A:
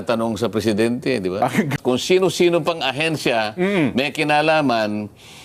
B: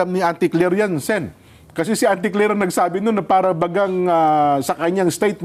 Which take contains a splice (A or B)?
A